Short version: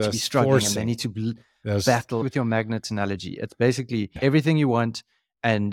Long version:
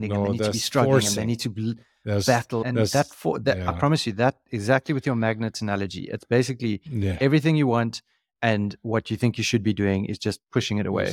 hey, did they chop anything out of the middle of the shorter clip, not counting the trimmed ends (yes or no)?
yes